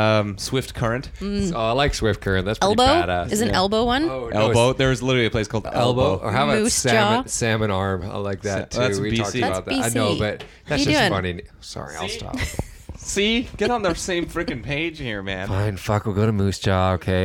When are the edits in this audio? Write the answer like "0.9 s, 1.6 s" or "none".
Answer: 15.4 s

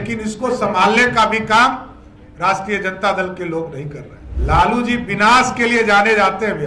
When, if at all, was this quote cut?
4.3 s

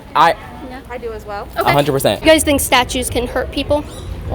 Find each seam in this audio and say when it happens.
2.2 s

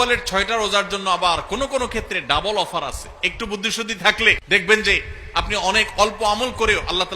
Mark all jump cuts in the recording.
4.4 s

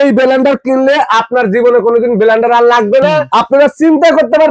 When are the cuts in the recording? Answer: 3.2 s

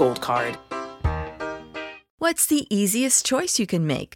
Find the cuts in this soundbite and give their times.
2.2 s

